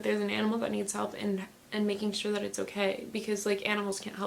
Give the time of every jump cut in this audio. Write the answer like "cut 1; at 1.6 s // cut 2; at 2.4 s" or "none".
none